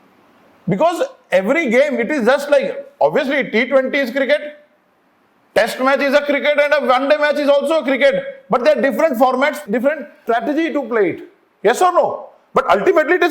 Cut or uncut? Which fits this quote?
cut